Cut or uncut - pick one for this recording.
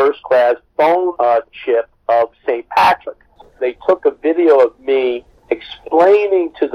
cut